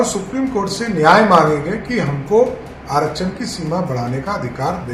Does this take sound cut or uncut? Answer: uncut